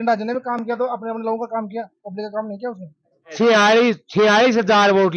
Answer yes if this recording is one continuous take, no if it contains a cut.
no